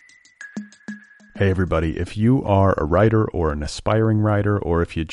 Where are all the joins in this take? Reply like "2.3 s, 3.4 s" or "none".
0.9 s